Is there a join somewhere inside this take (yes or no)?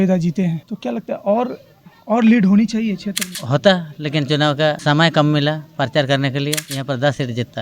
yes